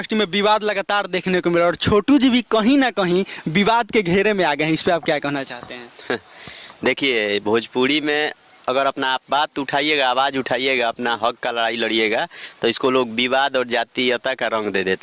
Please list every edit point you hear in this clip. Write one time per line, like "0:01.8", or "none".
none